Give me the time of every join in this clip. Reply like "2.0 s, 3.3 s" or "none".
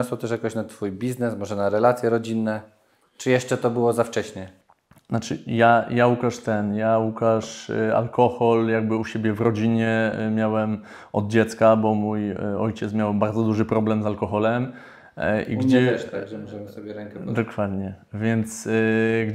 none

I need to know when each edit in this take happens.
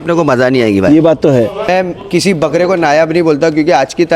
1.7 s

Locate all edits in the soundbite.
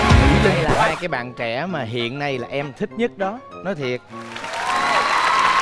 0.9 s

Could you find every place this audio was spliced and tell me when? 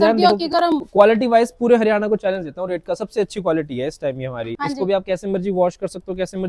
0.9 s, 4.5 s

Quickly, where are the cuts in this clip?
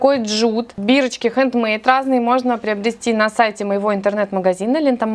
none

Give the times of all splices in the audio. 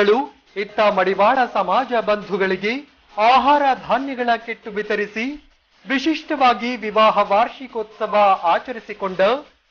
none

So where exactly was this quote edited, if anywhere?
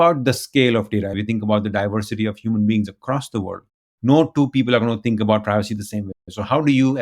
1.1 s

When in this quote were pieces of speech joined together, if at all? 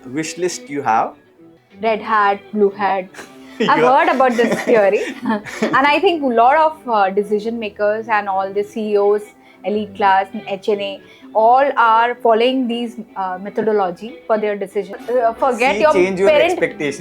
1.7 s, 15.0 s

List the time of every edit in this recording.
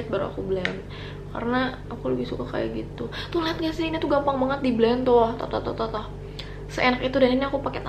none

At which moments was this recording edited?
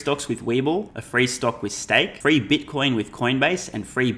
1.0 s, 2.1 s

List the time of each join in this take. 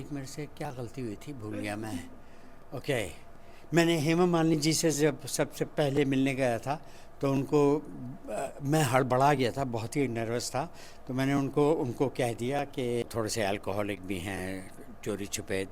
13.0 s

